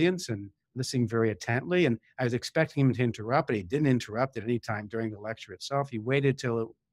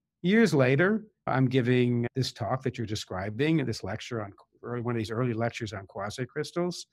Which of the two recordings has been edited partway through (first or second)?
second